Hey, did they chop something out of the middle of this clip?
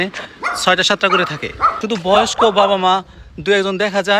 yes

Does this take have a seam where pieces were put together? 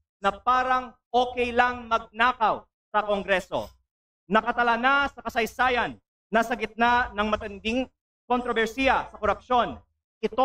no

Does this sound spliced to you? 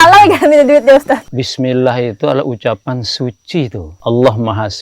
yes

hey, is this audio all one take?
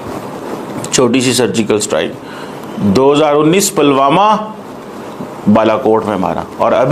yes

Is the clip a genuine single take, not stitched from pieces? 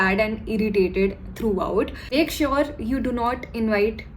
no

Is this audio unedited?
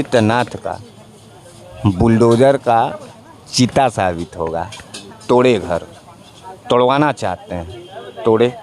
yes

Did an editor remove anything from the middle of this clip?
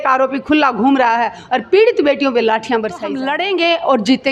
yes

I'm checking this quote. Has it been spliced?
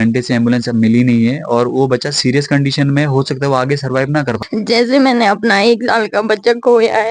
yes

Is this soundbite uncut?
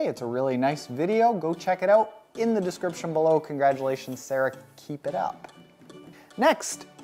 yes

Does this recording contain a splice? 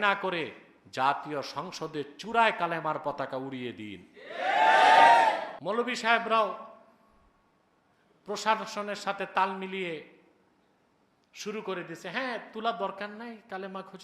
yes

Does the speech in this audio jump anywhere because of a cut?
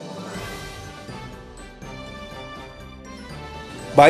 no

